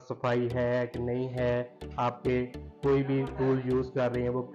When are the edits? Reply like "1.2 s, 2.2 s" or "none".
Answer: none